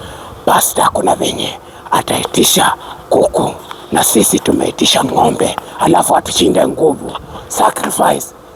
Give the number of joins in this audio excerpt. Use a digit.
0